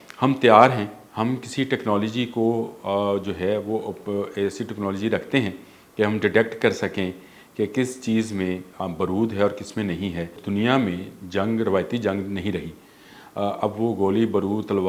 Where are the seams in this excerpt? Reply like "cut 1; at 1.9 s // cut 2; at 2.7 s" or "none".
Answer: cut 1; at 1.0 s // cut 2; at 10.4 s